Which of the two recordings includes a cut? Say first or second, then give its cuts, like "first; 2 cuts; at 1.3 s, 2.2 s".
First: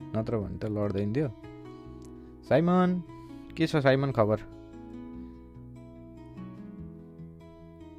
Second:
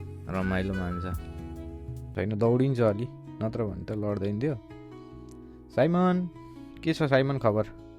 second; 1 cut; at 2.1 s